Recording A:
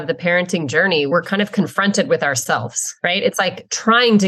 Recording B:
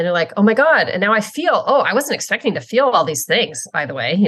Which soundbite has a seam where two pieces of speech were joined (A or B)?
A